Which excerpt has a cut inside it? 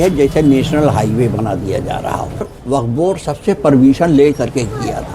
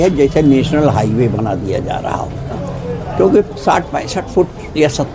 first; 1 cut; at 2.5 s

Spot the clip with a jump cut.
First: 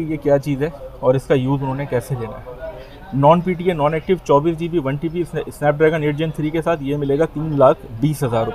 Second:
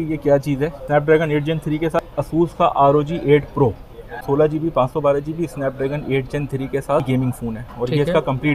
second; 4 cuts; at 0.8 s, 2.0 s, 4.2 s, 7.1 s

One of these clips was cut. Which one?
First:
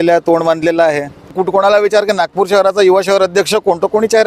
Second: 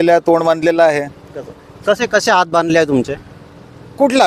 first; 1 cut; at 1.3 s

